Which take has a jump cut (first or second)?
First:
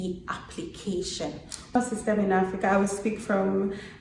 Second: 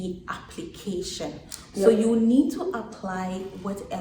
first